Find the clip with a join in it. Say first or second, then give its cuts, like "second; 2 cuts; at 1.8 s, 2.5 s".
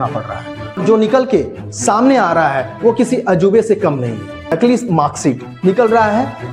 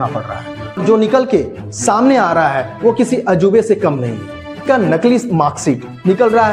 first; 1 cut; at 4.5 s